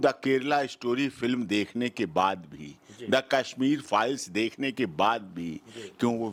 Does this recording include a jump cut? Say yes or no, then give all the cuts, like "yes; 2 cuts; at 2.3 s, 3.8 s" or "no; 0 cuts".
no; 0 cuts